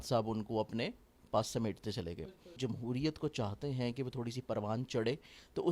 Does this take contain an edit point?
yes; 1 cut; at 2.5 s

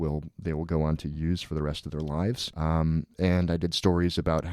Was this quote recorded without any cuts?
no; 1 cut; at 2.5 s

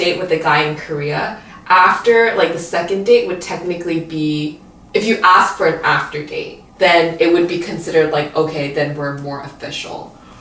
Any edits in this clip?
no; 0 cuts

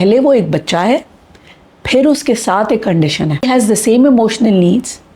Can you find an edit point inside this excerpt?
yes; 1 cut; at 3.4 s

